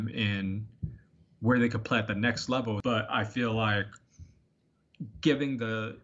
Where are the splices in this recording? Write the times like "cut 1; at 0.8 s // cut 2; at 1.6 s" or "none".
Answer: cut 1; at 2.8 s